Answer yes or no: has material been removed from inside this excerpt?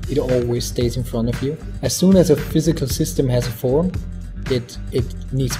yes